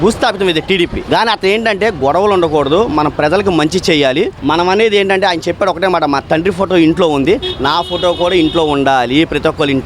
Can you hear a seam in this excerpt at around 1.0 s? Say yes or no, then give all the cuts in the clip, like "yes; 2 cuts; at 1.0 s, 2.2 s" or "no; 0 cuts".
yes; 2 cuts; at 1.0 s, 4.4 s